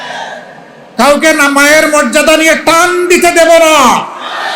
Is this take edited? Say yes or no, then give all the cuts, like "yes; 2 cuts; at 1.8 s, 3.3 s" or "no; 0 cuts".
no; 0 cuts